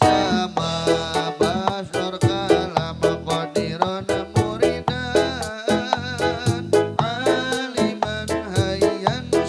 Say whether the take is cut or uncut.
uncut